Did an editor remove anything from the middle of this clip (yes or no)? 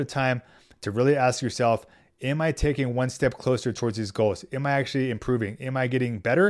no